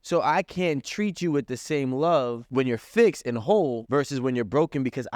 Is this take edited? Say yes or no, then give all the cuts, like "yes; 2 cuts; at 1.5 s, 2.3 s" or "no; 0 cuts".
yes; 2 cuts; at 2.4 s, 3.8 s